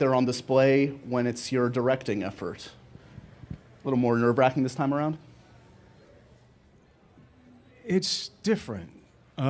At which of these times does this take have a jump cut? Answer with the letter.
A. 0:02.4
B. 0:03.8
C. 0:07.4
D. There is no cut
C